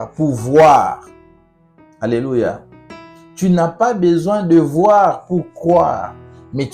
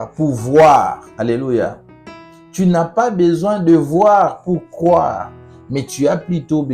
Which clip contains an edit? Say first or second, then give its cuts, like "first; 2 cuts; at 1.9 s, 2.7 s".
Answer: second; 1 cut; at 1.0 s